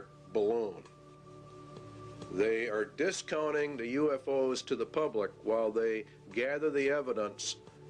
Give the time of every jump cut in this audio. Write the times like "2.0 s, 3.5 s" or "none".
none